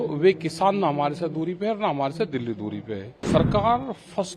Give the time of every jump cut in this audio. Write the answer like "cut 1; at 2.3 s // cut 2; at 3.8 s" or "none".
cut 1; at 3.1 s